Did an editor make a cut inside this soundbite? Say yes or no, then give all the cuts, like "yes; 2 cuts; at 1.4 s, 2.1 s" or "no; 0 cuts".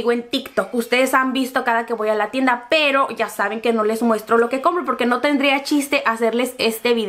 no; 0 cuts